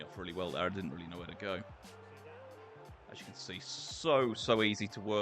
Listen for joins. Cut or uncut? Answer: uncut